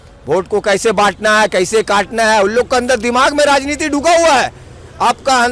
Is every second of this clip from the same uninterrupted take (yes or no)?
yes